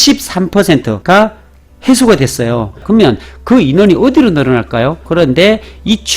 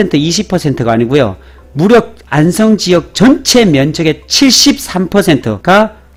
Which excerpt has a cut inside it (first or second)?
first